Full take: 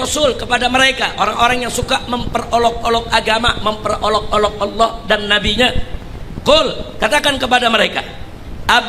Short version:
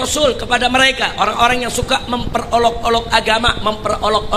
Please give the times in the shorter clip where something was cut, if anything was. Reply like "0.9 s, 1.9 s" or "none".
none